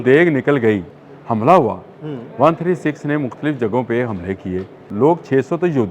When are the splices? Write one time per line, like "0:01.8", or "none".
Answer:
0:00.9
0:04.9